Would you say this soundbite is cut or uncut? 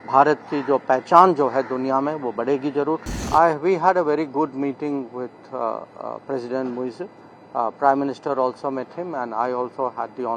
cut